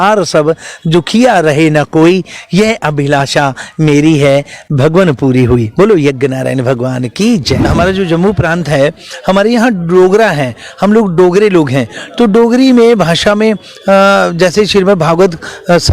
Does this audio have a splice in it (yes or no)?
yes